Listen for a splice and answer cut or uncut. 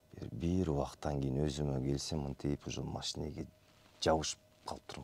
uncut